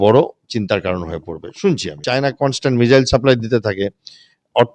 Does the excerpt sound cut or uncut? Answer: cut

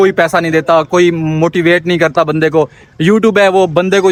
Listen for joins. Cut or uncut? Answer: uncut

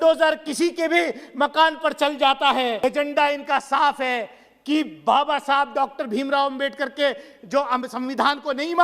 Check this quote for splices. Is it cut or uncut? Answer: cut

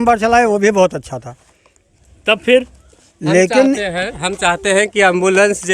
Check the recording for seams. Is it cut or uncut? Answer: uncut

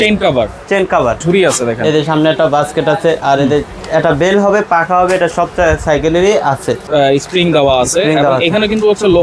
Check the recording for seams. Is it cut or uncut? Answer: cut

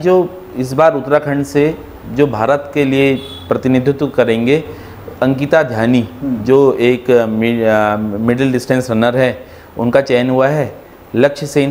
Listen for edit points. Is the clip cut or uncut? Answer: uncut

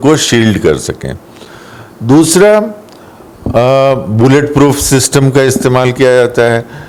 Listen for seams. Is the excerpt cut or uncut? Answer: uncut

